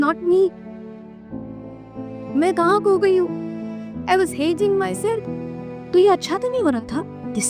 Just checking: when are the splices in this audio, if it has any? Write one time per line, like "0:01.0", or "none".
0:05.2